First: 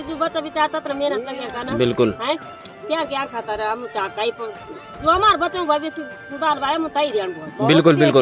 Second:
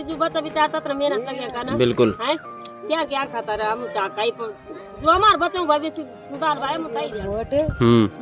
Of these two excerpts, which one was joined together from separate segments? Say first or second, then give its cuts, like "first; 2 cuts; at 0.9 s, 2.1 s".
second; 1 cut; at 7.1 s